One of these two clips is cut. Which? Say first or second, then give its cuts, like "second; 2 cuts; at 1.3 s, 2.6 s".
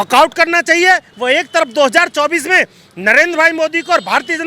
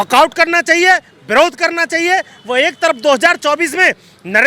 first; 1 cut; at 1.1 s